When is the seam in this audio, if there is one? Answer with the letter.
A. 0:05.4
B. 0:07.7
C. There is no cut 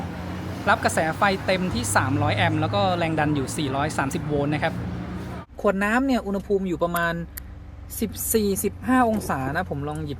A